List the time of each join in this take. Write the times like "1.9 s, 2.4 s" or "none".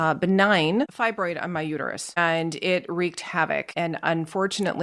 0.9 s, 2.2 s, 3.7 s